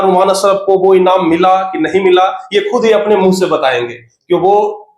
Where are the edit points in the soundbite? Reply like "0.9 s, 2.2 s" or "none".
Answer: none